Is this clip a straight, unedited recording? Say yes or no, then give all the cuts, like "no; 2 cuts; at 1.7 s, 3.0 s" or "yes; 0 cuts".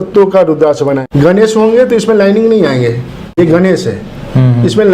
no; 2 cuts; at 1.1 s, 3.4 s